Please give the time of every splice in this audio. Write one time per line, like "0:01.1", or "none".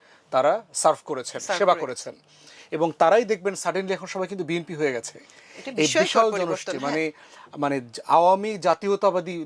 none